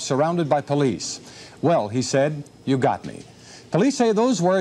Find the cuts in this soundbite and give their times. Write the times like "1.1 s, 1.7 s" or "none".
none

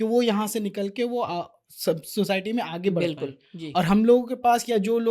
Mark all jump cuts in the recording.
none

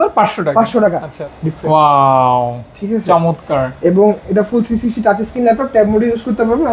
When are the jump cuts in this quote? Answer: 1.2 s

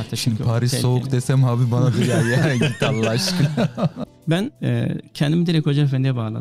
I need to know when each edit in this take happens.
4.0 s

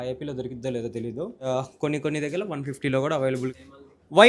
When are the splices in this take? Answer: 1.5 s, 3.5 s

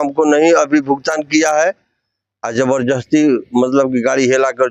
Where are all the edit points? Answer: none

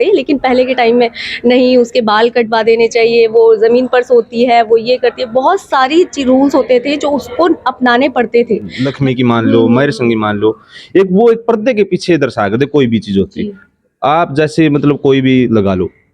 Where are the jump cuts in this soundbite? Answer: 8.8 s

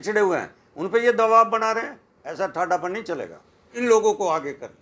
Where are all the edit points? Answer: 3.7 s

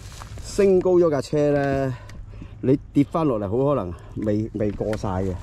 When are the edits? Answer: none

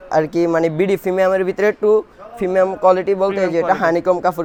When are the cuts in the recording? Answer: none

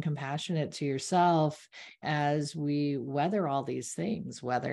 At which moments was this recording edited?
2.0 s

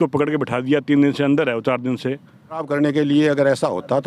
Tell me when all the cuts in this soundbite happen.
2.6 s

